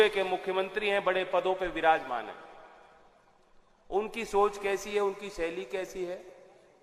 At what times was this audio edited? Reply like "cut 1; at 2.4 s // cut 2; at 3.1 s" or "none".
none